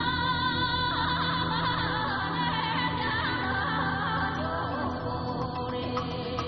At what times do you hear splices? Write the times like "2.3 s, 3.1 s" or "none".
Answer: none